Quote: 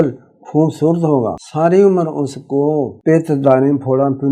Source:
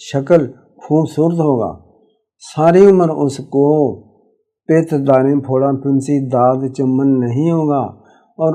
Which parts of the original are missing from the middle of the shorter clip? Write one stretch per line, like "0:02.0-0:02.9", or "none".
0:01.8-0:02.5
0:04.0-0:04.6